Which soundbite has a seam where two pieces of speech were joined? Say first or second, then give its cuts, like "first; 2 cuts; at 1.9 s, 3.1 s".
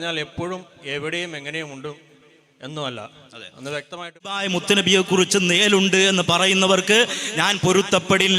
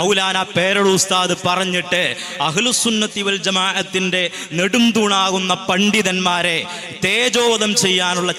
first; 1 cut; at 4.3 s